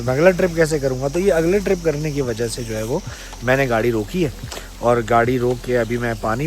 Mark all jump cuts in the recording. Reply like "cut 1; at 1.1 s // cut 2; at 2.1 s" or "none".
none